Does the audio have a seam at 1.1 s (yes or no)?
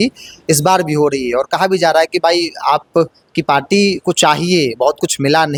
no